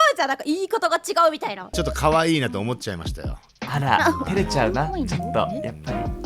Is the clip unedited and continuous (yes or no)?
no